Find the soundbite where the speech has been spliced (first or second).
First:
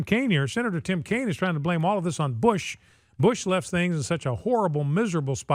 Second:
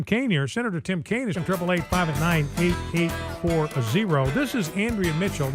first